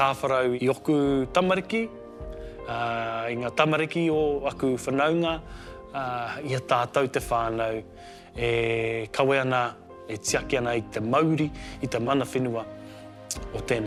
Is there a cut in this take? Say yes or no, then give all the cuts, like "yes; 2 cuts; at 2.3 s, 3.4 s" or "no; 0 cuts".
no; 0 cuts